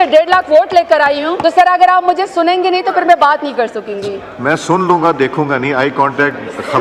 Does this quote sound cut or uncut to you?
cut